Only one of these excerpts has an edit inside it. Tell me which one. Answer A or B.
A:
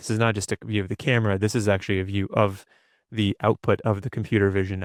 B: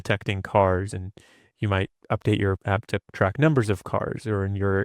B